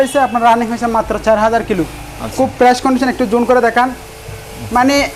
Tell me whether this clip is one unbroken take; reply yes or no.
yes